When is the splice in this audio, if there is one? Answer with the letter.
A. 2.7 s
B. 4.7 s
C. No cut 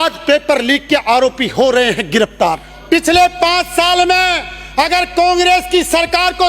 A